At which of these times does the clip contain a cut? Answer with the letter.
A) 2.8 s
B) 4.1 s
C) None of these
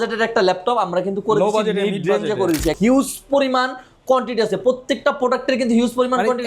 A